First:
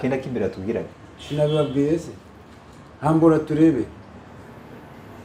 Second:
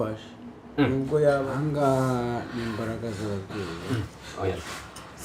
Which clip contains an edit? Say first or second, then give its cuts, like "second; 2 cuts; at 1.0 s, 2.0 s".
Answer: second; 1 cut; at 1.4 s